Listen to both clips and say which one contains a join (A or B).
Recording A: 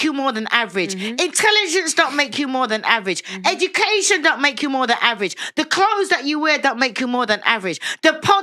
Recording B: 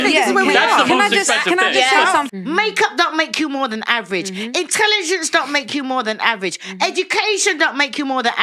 B